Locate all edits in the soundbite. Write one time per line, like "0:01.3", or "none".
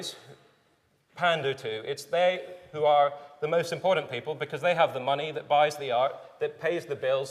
0:05.0